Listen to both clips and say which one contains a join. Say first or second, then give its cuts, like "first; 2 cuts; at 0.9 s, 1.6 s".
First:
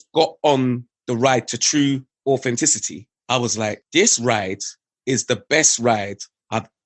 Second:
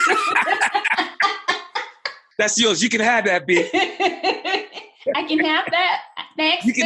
first; 2 cuts; at 0.9 s, 2.1 s